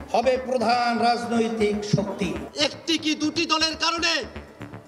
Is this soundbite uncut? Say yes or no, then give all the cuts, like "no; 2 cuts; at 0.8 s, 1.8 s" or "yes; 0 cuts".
no; 1 cut; at 2.4 s